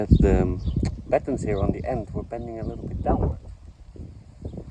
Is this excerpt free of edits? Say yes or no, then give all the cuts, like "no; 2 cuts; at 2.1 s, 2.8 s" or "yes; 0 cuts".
yes; 0 cuts